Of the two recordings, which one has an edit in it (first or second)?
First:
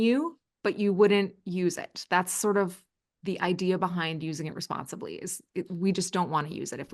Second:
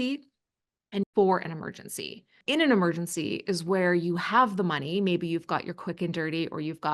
second